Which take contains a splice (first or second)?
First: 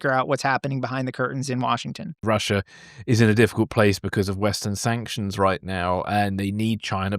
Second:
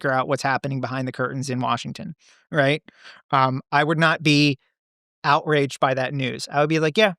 first